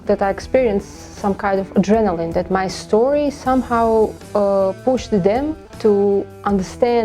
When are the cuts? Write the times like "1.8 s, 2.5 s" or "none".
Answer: 5.6 s